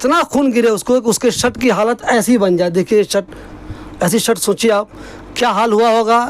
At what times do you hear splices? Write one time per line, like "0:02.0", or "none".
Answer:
none